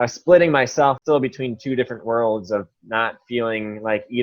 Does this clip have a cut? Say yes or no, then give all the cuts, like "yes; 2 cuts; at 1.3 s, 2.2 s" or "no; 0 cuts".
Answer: yes; 1 cut; at 1.0 s